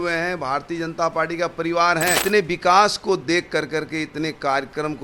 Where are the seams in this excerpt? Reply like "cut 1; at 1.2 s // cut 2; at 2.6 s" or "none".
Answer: cut 1; at 2.2 s